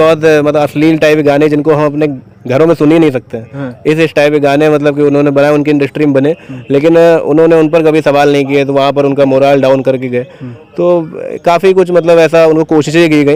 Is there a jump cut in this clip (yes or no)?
no